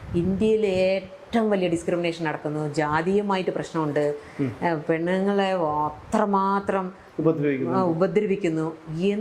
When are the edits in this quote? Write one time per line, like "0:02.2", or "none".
none